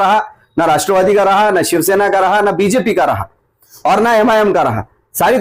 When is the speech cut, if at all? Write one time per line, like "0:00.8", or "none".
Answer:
none